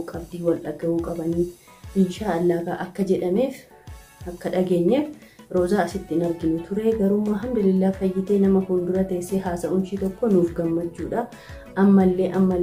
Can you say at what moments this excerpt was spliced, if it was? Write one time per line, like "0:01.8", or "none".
none